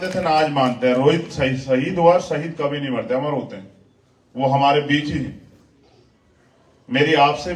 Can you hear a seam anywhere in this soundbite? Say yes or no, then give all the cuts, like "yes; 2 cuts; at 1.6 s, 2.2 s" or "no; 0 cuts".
no; 0 cuts